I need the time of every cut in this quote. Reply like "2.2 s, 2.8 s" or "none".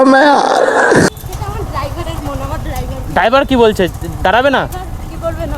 1.1 s

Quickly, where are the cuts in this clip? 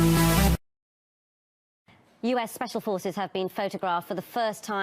3.5 s

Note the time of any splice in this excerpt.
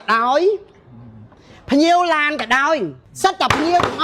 3.0 s

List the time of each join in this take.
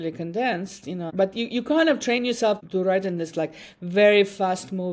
1.1 s, 2.6 s

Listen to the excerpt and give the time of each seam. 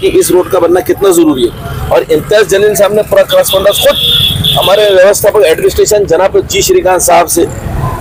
none

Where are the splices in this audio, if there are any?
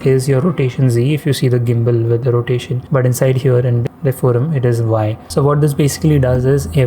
2.8 s, 3.9 s, 5.2 s

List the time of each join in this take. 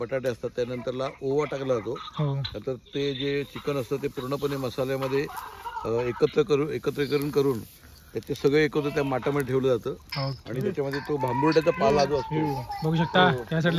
none

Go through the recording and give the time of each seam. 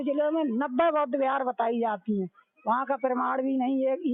none

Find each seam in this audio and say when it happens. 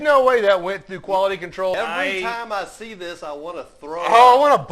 1.7 s

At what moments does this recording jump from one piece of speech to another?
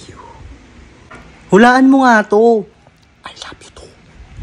none

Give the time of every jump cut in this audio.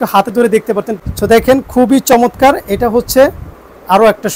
1.0 s

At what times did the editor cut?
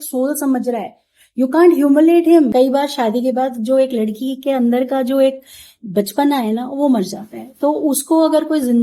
2.5 s

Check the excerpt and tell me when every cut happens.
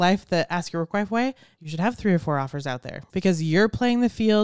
1.5 s

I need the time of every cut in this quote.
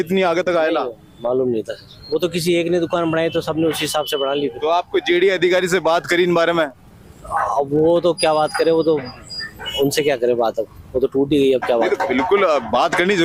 none

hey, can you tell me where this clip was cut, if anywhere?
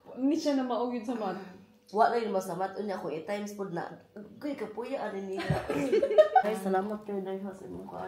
6.4 s

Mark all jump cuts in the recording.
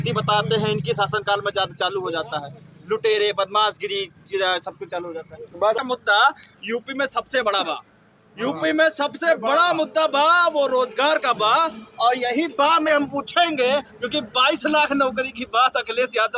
5.8 s

